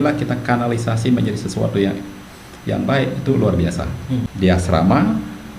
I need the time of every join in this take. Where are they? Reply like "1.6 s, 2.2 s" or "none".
4.3 s